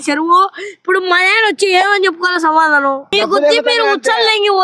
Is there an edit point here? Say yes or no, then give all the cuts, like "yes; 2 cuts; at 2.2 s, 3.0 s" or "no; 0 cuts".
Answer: yes; 1 cut; at 3.1 s